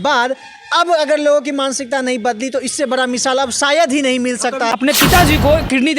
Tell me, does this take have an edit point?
yes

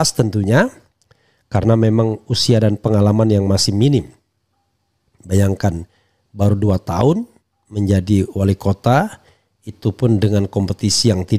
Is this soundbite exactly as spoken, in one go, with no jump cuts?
yes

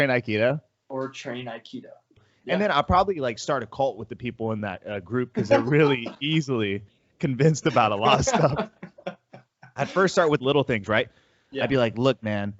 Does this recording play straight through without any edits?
no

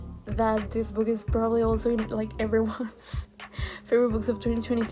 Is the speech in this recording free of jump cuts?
yes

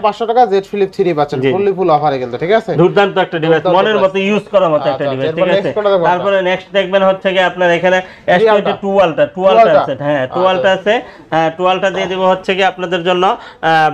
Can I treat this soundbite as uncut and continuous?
yes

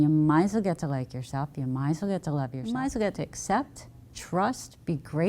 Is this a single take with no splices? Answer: no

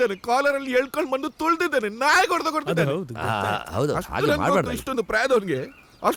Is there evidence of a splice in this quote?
no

